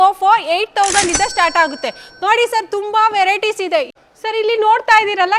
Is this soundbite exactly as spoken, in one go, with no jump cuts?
no; 1 cut; at 3.9 s

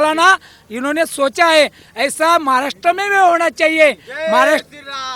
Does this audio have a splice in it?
no; 0 cuts

